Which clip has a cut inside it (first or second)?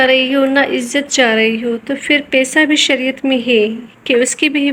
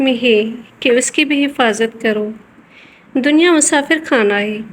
second